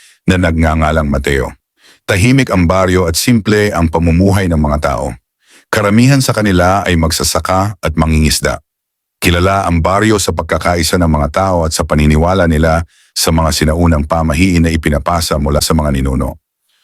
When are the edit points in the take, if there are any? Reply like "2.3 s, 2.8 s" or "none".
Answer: 15.6 s